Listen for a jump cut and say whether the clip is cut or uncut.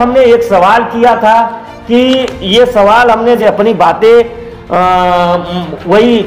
cut